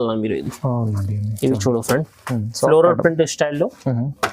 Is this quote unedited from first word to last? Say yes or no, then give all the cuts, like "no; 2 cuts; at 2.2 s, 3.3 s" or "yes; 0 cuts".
no; 1 cut; at 2.4 s